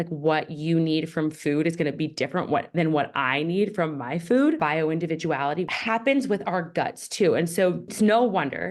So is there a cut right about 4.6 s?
yes; 2 cuts; at 4.6 s, 7.9 s

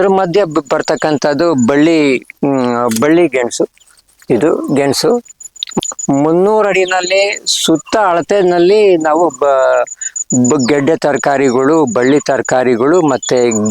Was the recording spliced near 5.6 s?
yes; 1 cut; at 5.6 s

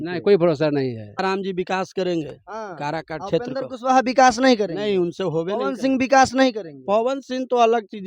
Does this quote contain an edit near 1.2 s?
yes; 1 cut; at 1.2 s

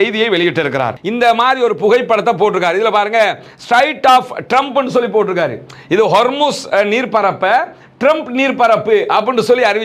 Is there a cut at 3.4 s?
no; 1 cut; at 0.9 s

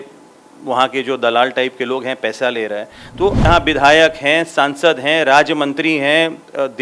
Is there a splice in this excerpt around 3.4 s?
yes; 1 cut; at 3.4 s

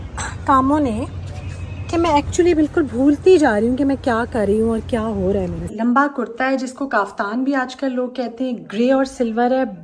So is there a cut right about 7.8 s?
no; 1 cut; at 5.7 s

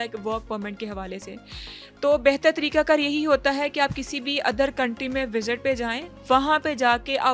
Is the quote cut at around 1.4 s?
no; 0 cuts

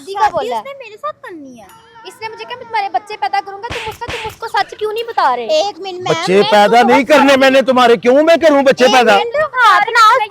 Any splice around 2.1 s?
yes; 1 cut; at 2.1 s

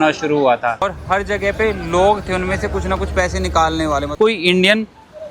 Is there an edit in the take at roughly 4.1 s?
yes; 2 cuts; at 1.0 s, 4.1 s

